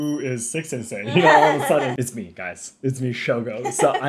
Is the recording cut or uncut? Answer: cut